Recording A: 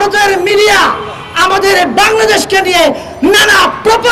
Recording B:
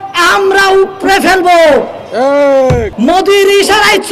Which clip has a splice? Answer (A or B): B